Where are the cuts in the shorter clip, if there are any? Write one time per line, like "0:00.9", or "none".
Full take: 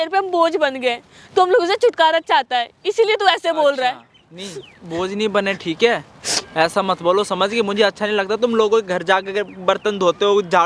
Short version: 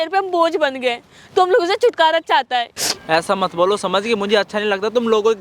0:02.8